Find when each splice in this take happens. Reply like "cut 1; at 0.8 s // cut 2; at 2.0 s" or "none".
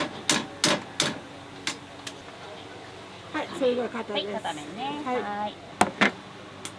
cut 1; at 2.2 s // cut 2; at 5.6 s